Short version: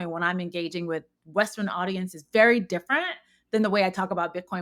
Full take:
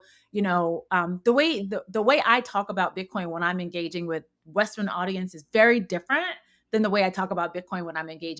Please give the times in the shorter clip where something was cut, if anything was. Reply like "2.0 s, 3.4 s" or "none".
none